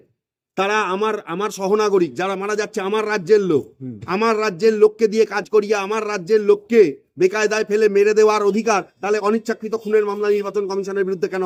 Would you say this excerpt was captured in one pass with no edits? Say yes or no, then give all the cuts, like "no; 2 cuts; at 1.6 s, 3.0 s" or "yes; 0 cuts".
yes; 0 cuts